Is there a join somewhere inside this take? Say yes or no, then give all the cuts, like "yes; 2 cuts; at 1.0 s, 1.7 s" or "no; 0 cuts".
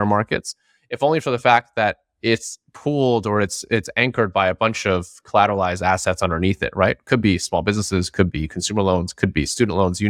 no; 0 cuts